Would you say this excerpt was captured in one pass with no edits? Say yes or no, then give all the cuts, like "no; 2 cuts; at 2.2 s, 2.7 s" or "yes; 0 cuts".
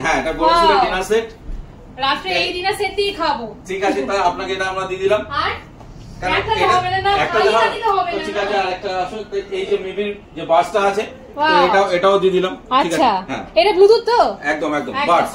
yes; 0 cuts